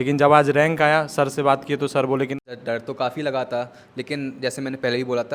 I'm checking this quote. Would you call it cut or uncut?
cut